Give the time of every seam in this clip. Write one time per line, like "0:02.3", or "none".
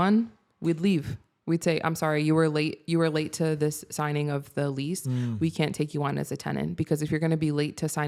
none